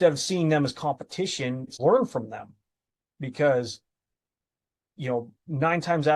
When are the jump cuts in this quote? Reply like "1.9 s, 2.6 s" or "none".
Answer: 1.7 s